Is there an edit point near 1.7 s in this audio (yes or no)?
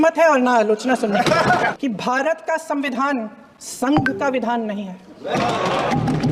yes